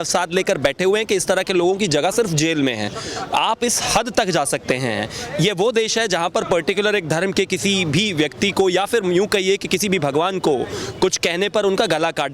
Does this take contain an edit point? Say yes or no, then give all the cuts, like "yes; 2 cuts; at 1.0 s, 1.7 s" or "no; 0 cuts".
no; 0 cuts